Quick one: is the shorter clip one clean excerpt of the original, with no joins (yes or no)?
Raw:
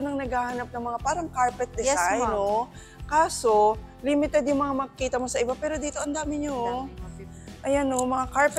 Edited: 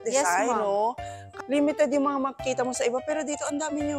no